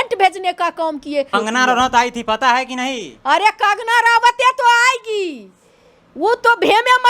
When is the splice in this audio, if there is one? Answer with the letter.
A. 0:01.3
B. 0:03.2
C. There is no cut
A